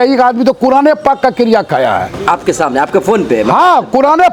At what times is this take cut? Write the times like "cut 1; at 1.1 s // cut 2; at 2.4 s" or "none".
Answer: none